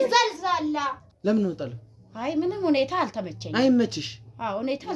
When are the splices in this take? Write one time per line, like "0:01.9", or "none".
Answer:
0:01.1